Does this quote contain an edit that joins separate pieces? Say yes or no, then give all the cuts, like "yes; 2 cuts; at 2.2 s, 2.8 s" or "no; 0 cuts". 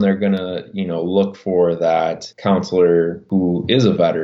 yes; 2 cuts; at 2.3 s, 3.2 s